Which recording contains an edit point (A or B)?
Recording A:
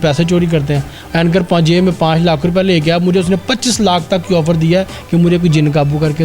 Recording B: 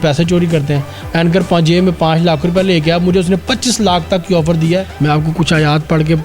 B